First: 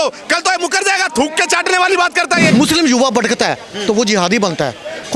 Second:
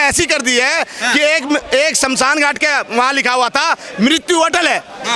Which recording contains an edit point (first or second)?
first